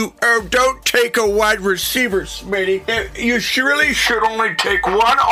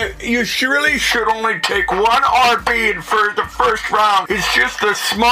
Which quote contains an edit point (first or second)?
second